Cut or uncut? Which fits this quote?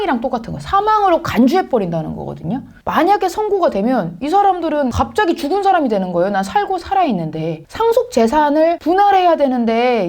cut